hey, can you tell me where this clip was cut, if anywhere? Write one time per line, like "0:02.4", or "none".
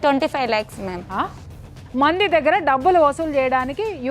0:01.4